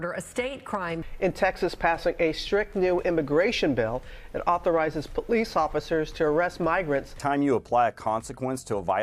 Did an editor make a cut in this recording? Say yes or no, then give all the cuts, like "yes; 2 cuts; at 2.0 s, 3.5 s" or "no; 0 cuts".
yes; 2 cuts; at 1.0 s, 7.1 s